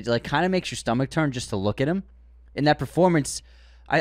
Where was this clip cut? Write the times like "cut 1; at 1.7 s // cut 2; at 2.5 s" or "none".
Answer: none